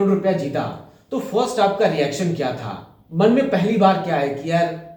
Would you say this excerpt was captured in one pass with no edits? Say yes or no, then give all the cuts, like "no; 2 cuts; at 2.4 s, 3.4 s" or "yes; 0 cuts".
yes; 0 cuts